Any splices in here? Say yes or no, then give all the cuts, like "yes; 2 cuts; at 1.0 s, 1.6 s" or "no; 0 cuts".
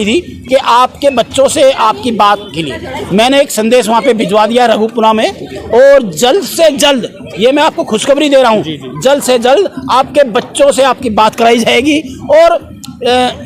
no; 0 cuts